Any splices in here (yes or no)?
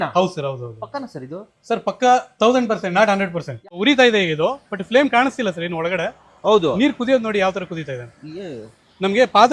yes